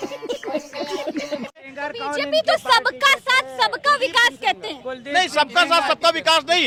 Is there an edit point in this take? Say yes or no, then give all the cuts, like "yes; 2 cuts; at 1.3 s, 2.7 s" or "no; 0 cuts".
no; 0 cuts